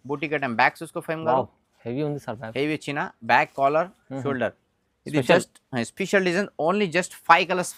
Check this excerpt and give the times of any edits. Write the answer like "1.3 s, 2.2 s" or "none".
none